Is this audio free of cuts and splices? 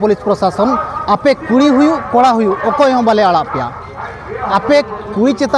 yes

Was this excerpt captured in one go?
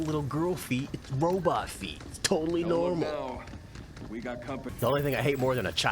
no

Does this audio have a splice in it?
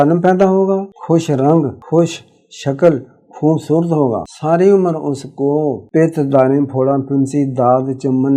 yes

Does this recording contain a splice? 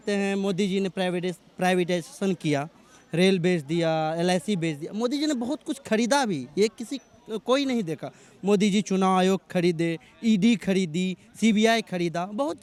no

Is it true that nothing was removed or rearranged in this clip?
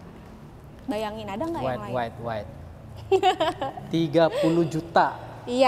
yes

